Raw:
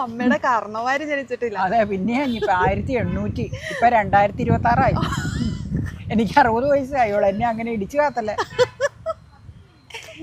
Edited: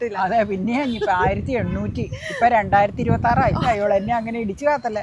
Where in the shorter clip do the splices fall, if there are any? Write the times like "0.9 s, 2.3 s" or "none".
3.6 s